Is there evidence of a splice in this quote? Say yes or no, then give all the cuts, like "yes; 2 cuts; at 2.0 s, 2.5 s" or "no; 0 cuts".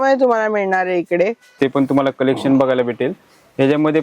yes; 1 cut; at 1.5 s